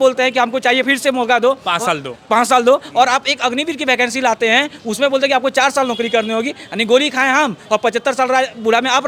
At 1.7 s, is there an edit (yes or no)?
no